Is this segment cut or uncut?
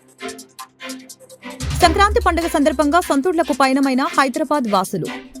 cut